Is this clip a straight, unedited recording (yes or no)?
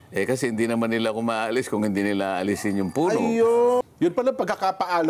no